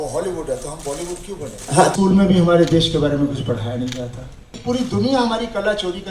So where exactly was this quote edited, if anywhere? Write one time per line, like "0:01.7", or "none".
0:01.9
0:04.5